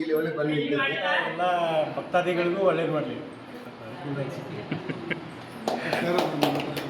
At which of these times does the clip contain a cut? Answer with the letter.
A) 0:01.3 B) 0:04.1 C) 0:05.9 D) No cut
A